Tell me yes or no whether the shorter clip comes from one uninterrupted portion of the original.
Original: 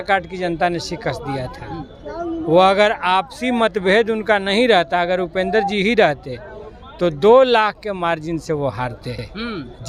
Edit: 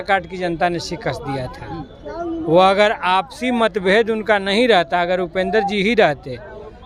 yes